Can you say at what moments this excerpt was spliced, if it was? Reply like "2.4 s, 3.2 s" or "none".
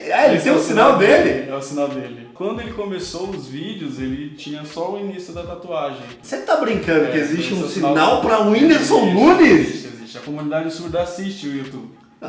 none